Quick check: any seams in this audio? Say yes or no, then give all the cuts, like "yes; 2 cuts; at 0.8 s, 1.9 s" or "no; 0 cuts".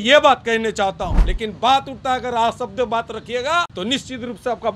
yes; 2 cuts; at 1.2 s, 3.7 s